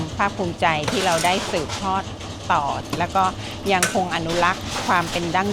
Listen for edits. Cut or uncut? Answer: cut